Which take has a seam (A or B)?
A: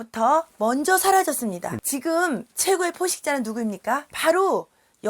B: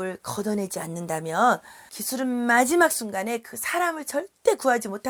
A